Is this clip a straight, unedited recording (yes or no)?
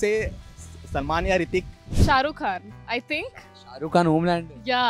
no